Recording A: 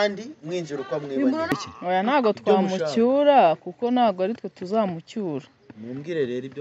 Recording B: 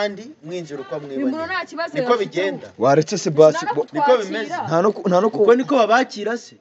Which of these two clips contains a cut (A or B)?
A